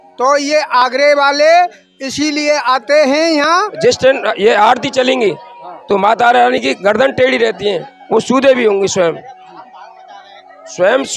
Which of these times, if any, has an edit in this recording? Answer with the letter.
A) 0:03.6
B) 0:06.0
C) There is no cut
A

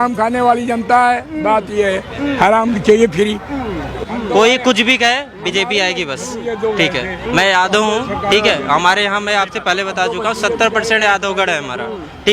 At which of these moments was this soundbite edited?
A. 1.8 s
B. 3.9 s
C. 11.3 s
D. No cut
B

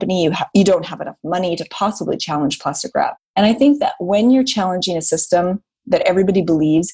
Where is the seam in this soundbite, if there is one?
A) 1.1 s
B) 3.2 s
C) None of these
B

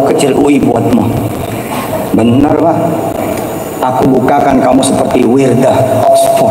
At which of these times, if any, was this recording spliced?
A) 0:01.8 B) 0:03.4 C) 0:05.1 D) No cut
D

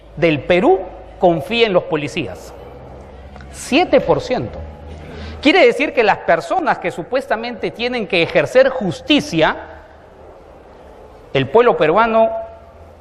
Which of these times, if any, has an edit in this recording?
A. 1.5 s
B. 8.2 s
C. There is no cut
A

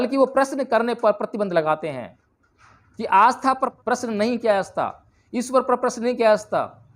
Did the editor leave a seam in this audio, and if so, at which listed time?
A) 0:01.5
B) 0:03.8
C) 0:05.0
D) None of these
B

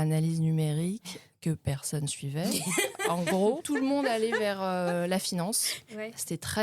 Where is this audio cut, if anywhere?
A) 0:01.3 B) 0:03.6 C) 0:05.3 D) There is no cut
B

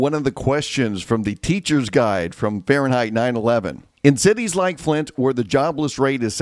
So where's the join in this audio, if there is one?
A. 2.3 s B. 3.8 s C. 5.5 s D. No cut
B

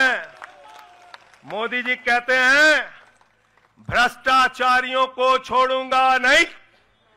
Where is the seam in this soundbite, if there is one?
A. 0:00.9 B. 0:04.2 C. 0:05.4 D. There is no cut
D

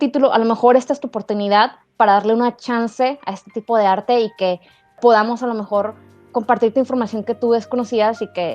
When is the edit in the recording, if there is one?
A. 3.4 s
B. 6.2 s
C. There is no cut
B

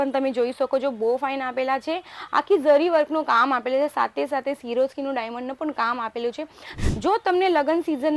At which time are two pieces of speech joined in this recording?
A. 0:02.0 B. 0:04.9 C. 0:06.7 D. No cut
C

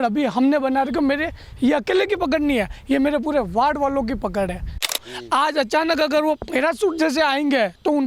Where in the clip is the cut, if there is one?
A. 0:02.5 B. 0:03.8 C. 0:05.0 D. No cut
C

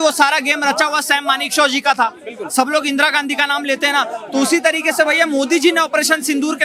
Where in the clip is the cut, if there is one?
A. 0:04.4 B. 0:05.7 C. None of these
C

